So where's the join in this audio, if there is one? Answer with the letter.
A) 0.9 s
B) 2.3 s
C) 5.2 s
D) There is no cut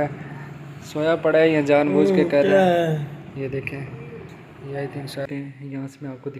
C